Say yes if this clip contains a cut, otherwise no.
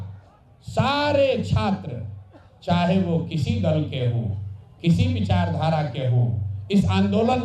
no